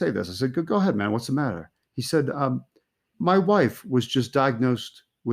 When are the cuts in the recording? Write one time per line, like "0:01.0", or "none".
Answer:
0:03.1